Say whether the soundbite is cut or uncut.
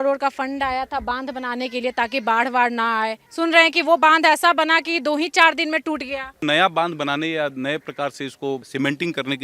cut